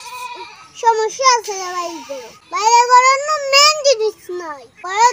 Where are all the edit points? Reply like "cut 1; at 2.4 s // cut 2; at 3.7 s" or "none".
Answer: cut 1; at 2.4 s